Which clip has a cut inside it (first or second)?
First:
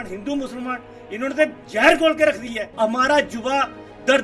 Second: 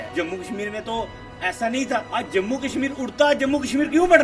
first